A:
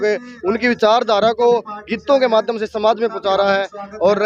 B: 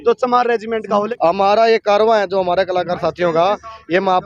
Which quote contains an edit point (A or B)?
B